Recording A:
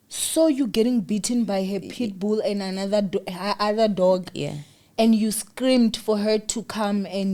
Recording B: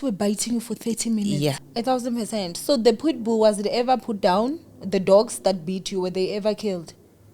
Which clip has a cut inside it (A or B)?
B